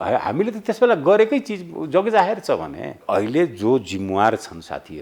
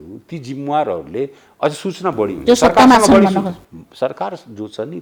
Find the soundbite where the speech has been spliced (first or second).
first